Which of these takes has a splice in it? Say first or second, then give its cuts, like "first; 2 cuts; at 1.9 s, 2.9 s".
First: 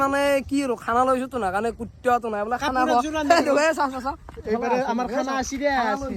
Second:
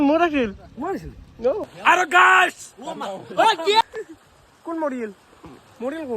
second; 1 cut; at 1.7 s